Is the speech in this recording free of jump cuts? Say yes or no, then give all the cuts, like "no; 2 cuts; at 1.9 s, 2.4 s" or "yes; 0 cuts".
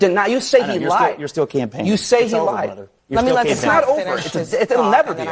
yes; 0 cuts